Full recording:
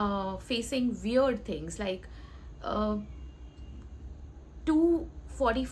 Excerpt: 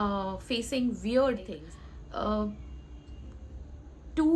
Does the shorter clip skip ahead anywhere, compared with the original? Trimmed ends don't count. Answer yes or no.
yes